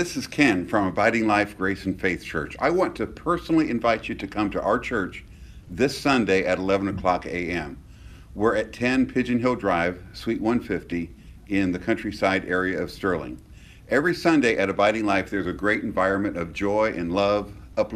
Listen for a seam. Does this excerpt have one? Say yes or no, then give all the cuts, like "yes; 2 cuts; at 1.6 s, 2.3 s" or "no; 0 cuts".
no; 0 cuts